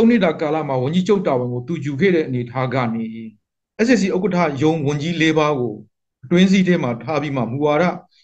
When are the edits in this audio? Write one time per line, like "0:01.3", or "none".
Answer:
none